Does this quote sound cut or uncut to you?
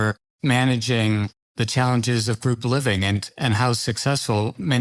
uncut